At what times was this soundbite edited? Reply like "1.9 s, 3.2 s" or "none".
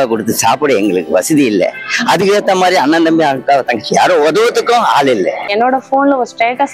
5.5 s